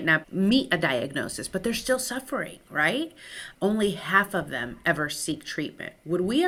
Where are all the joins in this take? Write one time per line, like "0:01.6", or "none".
none